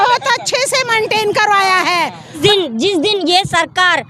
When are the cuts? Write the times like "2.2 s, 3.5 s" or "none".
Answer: 2.4 s